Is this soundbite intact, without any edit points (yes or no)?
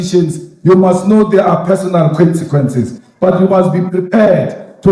yes